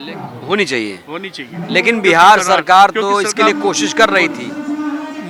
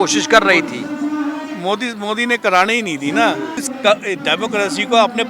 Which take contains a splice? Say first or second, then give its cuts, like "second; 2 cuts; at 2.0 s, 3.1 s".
second; 1 cut; at 3.6 s